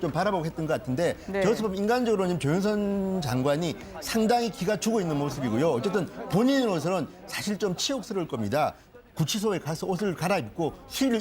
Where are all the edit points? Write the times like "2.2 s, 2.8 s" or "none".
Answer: 2.7 s

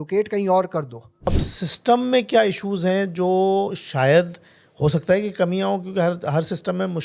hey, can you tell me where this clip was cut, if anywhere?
1.4 s

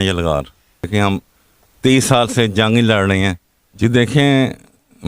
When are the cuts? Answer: 0.9 s, 3.8 s

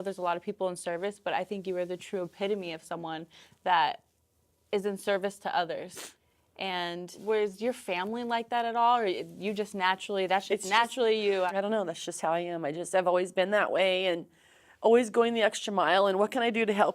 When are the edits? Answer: 7.2 s, 11.5 s

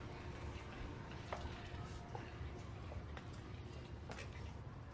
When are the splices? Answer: none

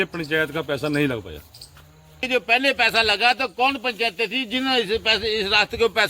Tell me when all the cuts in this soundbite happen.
1.8 s

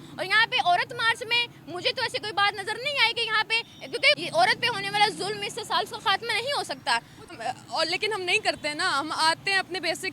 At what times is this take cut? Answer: 4.2 s, 7.4 s

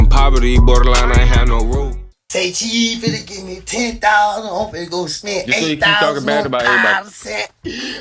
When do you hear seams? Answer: 2.0 s

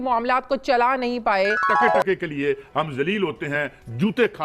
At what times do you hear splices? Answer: 1.7 s

